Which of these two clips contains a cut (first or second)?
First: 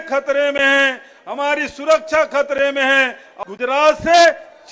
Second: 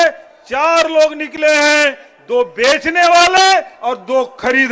first